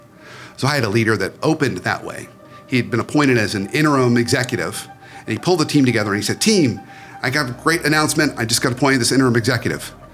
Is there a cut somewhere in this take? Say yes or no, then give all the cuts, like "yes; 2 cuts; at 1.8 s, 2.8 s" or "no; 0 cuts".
no; 0 cuts